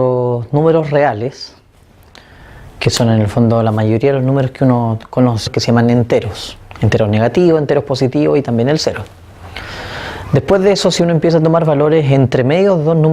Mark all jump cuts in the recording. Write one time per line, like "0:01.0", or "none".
none